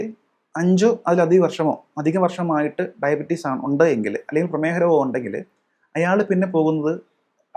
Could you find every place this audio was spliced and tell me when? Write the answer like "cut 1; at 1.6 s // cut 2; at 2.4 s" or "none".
none

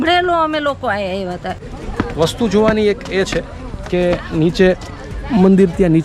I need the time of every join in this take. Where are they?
cut 1; at 1.6 s

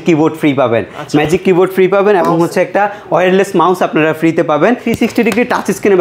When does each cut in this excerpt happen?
cut 1; at 4.8 s

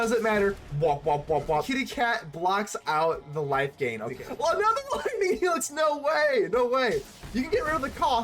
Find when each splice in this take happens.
cut 1; at 1.7 s // cut 2; at 4.2 s

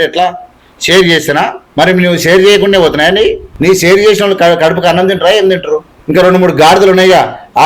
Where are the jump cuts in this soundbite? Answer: cut 1; at 1.6 s // cut 2; at 3.5 s // cut 3; at 5.9 s

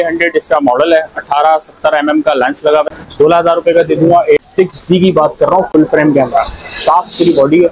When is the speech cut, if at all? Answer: cut 1; at 2.8 s // cut 2; at 4.4 s

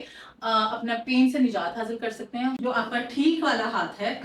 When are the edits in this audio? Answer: cut 1; at 2.6 s

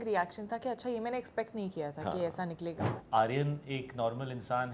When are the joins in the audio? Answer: cut 1; at 2.9 s

